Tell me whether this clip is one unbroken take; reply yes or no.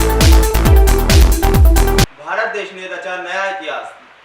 no